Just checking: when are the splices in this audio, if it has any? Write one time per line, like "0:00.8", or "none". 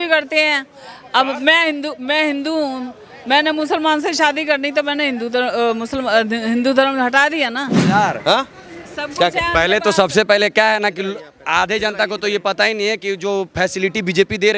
0:07.8